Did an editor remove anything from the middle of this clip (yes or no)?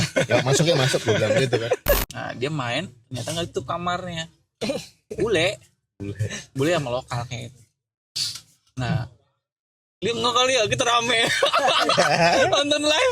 yes